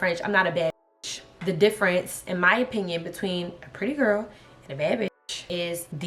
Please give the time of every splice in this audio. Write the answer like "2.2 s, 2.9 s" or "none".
1.3 s